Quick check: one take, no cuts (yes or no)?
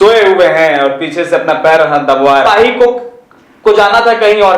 no